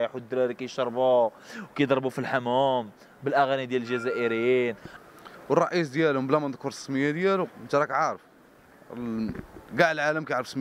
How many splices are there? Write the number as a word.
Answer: one